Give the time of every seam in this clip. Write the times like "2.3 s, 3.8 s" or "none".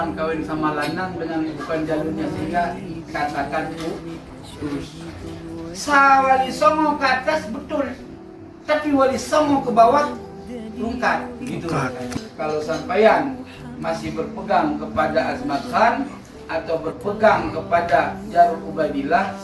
12.1 s